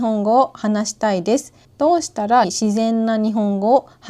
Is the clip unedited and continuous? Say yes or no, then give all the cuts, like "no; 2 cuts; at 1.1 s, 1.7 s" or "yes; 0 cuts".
no; 2 cuts; at 1.6 s, 2.5 s